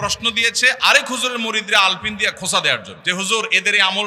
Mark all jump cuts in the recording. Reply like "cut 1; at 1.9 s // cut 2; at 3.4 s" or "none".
cut 1; at 2.9 s